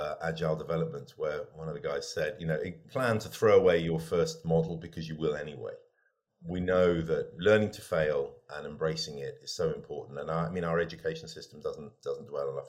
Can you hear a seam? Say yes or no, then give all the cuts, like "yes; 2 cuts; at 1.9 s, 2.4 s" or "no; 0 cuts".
yes; 3 cuts; at 2.8 s, 6.3 s, 7.3 s